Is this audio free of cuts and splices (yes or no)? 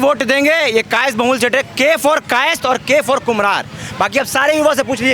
yes